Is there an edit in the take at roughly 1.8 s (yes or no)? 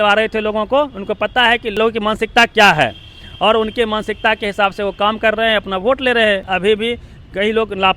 yes